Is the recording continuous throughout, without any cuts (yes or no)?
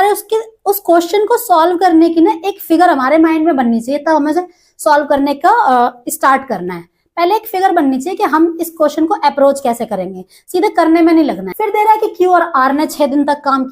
no